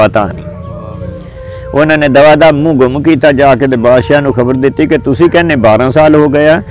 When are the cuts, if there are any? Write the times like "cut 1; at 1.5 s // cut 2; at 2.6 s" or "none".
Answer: none